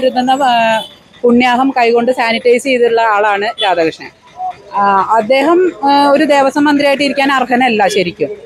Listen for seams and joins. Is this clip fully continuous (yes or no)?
yes